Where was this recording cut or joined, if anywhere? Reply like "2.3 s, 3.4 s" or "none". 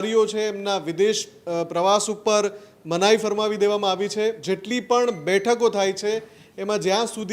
4.4 s